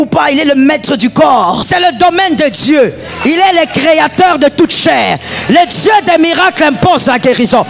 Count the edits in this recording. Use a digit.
1